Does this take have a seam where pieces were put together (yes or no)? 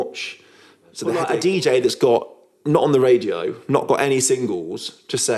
yes